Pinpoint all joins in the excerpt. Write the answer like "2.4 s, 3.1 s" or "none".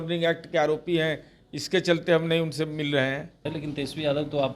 3.5 s